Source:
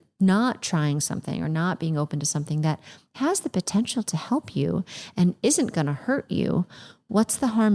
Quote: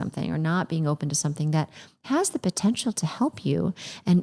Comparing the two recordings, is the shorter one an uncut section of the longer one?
yes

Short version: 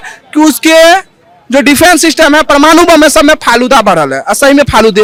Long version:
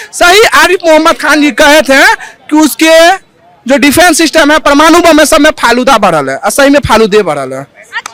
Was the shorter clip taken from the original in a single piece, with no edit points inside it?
yes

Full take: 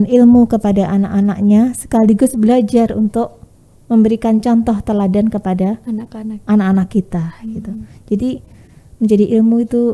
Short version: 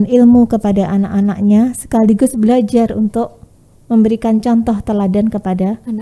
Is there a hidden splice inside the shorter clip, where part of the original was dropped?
no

